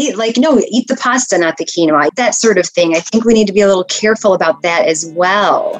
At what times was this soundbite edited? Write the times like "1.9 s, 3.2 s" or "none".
2.1 s